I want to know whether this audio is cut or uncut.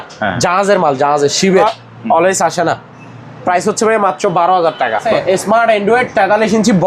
cut